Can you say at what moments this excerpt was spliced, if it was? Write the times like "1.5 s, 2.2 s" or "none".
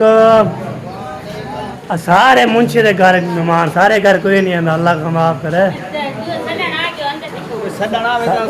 1.8 s, 7.3 s